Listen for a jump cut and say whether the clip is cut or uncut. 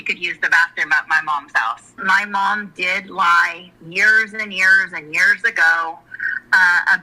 cut